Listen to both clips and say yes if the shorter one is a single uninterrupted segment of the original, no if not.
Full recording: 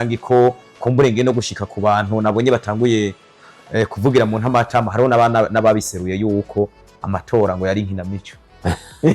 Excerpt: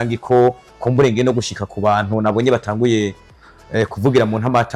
yes